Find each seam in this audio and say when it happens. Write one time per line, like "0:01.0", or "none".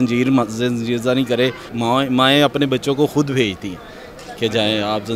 0:01.6